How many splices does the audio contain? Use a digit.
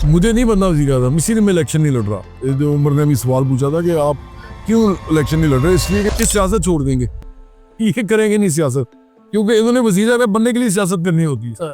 1